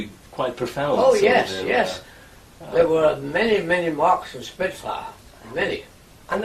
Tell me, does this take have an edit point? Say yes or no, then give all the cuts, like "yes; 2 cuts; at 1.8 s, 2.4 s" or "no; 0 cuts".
yes; 1 cut; at 3.5 s